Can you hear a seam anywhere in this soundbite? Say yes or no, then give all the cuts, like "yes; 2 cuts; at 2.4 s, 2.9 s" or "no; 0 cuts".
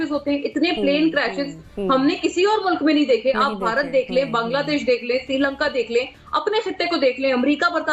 no; 0 cuts